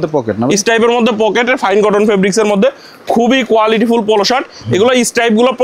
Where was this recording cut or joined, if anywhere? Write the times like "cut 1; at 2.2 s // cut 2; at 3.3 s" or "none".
none